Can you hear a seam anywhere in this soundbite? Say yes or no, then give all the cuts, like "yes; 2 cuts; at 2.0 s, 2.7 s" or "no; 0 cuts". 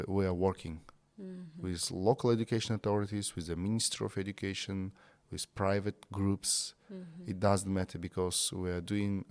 no; 0 cuts